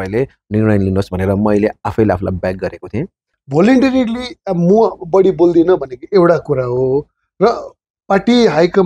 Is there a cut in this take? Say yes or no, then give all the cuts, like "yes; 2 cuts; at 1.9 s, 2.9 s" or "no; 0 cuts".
yes; 1 cut; at 3.3 s